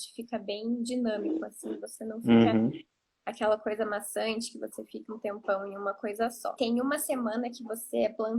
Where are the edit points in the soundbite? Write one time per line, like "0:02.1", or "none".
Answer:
0:05.0
0:06.5